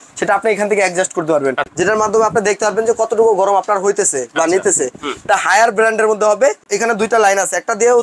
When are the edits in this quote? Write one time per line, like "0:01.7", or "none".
0:01.6
0:06.7